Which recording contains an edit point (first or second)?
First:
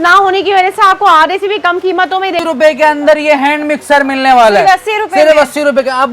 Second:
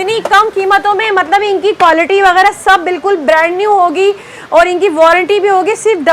first